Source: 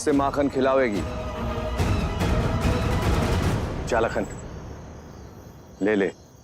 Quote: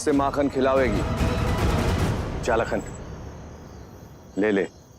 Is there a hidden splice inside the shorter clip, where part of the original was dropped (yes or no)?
yes